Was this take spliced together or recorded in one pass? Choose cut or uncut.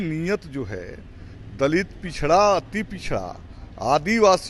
uncut